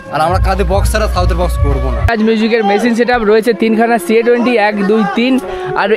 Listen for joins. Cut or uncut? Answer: cut